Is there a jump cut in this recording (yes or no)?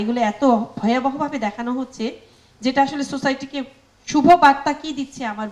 no